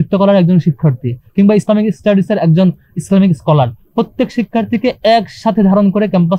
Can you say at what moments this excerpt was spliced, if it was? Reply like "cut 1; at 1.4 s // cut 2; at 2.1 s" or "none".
none